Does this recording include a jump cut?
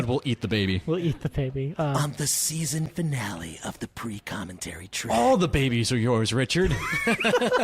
yes; 2 cuts; at 2.0 s, 5.1 s

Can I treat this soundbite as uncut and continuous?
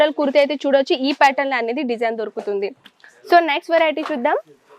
yes; 0 cuts

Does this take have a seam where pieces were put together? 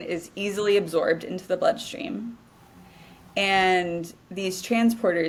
no; 0 cuts

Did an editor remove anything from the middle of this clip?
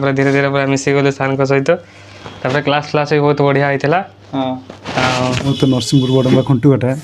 yes; 1 cut; at 5.5 s

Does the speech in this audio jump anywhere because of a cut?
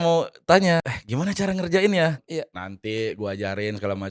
yes; 2 cuts; at 1.0 s, 2.2 s

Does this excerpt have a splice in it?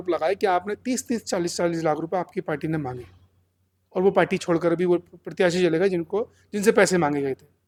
no; 0 cuts

